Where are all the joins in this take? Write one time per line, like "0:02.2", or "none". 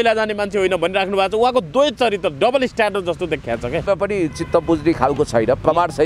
0:03.9

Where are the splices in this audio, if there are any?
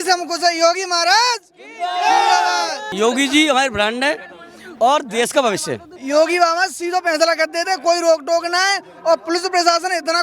0:02.9
0:05.9

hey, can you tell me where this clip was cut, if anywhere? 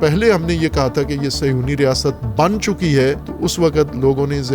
0:03.3

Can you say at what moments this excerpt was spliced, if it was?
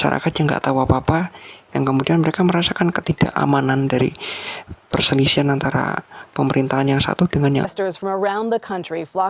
0:07.7

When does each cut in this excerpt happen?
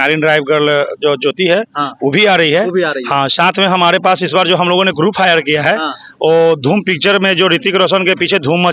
none

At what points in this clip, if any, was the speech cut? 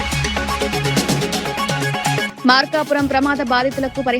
0:02.2

